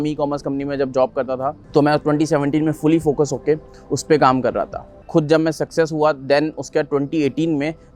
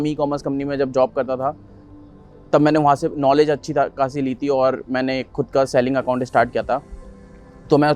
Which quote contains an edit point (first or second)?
first